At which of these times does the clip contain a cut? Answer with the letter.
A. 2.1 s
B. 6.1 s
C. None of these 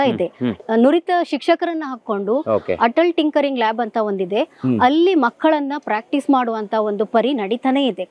C